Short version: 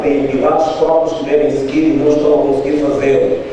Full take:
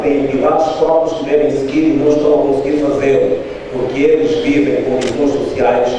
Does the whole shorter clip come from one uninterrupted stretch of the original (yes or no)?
yes